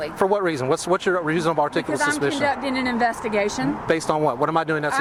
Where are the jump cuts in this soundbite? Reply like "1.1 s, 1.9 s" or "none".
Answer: none